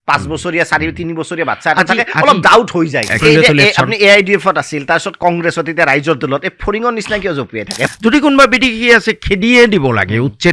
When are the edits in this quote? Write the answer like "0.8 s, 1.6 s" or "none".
3.2 s, 7.9 s